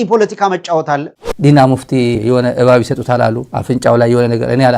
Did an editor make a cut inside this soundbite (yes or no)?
yes